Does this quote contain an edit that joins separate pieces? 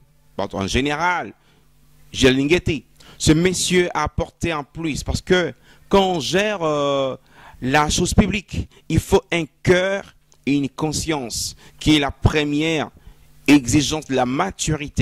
no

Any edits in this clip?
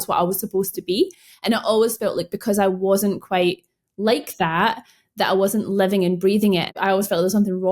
yes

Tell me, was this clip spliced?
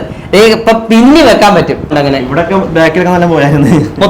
yes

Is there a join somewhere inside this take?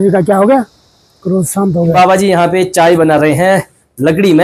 yes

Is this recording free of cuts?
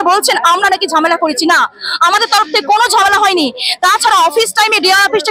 yes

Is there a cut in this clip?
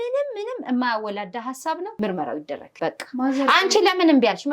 yes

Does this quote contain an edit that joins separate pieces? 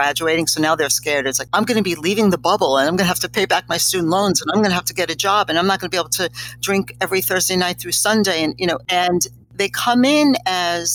yes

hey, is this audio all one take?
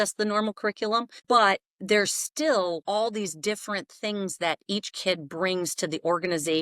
no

